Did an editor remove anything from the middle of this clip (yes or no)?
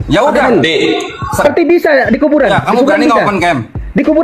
yes